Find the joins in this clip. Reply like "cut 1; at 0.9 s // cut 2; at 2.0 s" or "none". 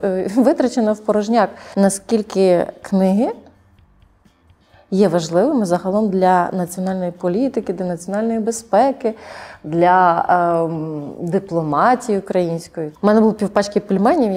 cut 1; at 1.6 s // cut 2; at 12.9 s